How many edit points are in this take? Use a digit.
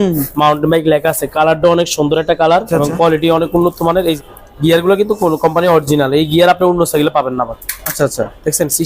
2